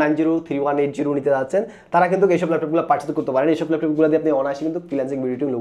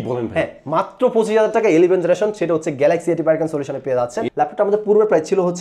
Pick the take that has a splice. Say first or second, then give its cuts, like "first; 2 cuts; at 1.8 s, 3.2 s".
second; 1 cut; at 4.3 s